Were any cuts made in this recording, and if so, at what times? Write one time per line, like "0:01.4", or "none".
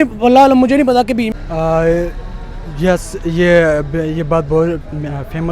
0:01.3